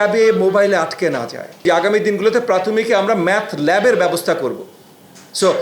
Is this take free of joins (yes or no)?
no